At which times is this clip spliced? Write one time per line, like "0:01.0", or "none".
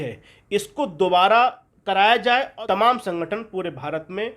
0:01.7
0:02.5